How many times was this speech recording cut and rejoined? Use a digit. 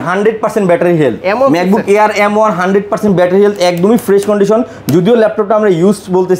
0